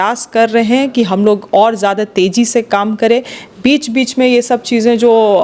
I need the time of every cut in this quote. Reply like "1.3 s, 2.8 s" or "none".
none